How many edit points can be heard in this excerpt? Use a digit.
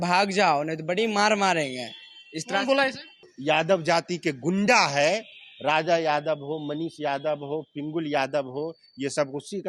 1